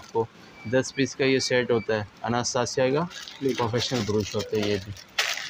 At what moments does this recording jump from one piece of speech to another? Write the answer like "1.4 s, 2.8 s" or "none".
none

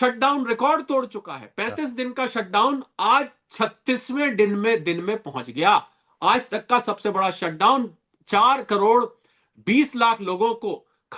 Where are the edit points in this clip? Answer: none

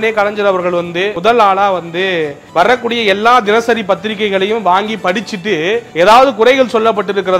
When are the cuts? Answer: 1.1 s

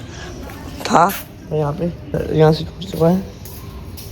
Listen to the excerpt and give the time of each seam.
2.2 s

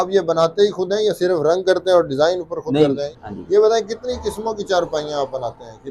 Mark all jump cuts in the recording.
3.1 s

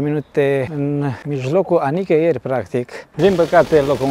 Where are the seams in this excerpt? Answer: 0.8 s, 3.0 s

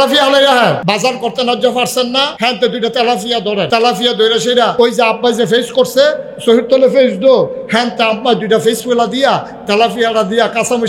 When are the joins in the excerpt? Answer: 0.8 s, 2.3 s, 3.7 s, 4.7 s

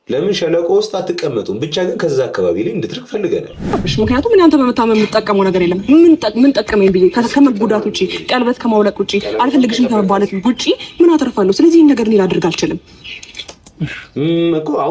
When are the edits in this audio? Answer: 3.7 s

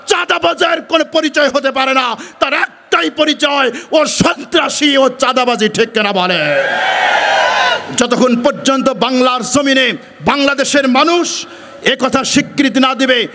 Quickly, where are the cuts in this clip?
none

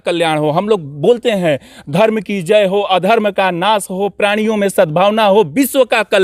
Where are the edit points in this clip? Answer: none

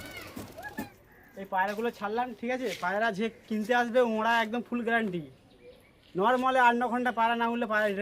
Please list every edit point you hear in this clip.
0.9 s

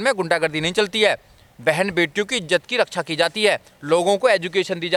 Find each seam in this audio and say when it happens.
none

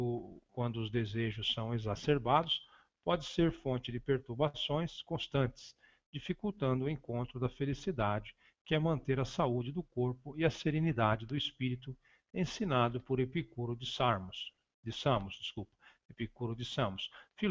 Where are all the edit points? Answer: 16.5 s

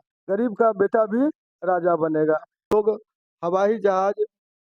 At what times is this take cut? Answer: 2.7 s

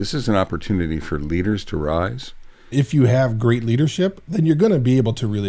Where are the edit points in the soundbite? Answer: 2.7 s

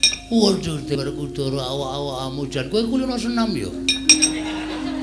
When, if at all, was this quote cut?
1.0 s

